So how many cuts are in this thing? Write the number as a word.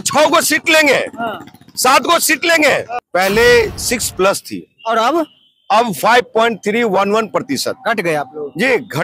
one